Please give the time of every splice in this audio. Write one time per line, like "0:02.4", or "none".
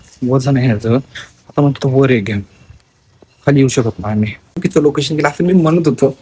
0:04.5